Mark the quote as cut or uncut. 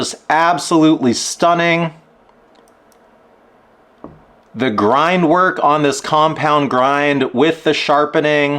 uncut